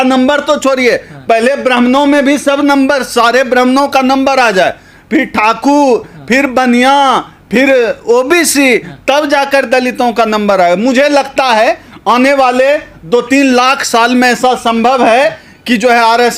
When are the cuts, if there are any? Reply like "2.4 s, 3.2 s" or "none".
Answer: none